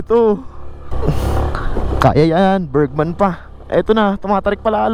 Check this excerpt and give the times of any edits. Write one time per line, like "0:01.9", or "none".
0:00.9